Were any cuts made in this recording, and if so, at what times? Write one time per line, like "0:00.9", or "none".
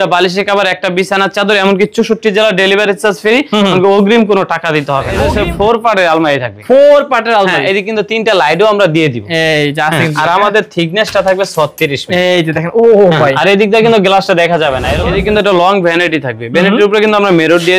0:05.1
0:14.9